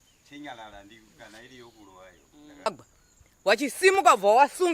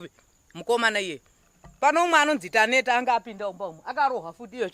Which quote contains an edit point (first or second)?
first